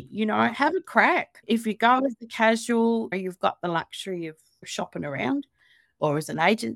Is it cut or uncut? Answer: cut